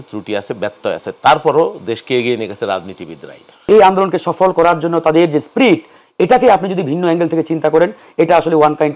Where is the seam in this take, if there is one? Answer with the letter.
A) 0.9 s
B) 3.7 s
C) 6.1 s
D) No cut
B